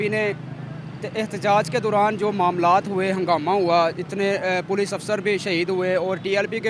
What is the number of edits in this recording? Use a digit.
0